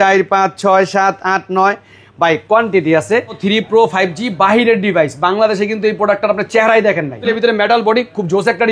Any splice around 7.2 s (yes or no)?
yes